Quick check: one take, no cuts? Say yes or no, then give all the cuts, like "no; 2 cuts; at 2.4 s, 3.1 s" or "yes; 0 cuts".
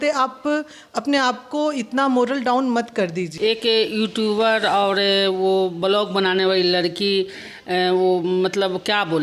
no; 1 cut; at 3.3 s